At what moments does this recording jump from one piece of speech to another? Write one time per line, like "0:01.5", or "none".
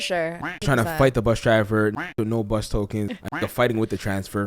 0:03.1